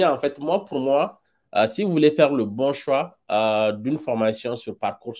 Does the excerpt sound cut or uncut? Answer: uncut